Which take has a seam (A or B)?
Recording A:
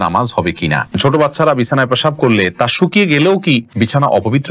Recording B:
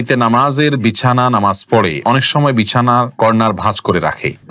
A